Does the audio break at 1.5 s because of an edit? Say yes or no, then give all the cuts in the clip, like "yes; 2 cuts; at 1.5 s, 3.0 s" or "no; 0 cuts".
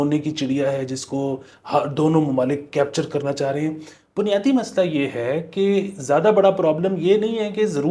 no; 0 cuts